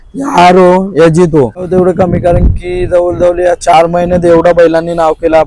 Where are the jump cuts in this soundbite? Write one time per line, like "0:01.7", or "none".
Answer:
0:01.7